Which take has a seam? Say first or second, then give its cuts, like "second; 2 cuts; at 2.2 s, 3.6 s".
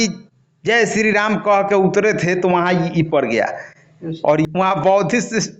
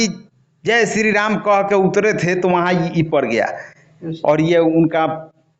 first; 1 cut; at 4.5 s